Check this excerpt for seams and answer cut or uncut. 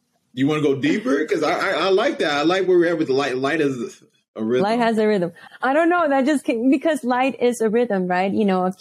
cut